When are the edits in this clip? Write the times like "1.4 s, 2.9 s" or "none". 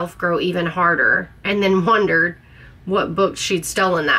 none